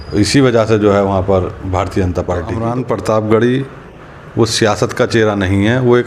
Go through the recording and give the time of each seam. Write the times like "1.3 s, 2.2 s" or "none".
2.5 s